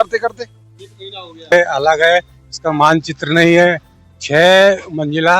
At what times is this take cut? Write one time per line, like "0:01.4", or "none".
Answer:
0:01.5